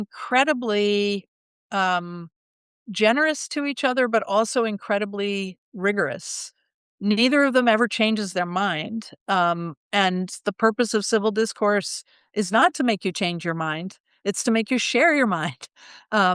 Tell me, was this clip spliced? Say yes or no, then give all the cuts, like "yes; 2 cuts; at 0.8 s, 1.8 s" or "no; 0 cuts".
no; 0 cuts